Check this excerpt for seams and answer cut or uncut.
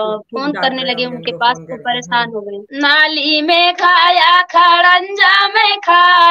cut